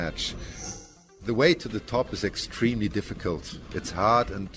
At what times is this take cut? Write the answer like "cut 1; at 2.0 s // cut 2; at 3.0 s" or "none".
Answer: cut 1; at 1.0 s